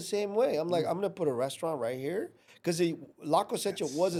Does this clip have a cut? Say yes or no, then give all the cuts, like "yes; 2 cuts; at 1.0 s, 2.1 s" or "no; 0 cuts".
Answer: no; 0 cuts